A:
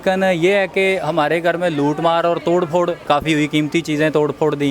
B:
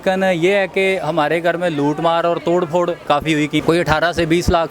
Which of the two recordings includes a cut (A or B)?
B